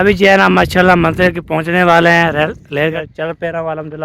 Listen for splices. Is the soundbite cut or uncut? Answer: cut